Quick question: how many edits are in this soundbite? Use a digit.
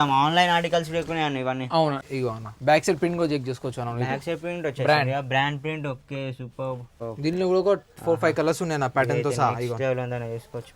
2